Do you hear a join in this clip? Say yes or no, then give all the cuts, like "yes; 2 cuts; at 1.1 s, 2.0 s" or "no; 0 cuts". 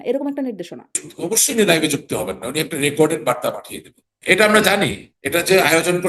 yes; 2 cuts; at 1.1 s, 4.1 s